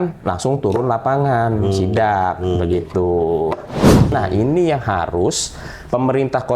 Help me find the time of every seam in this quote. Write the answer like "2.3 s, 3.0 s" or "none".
4.1 s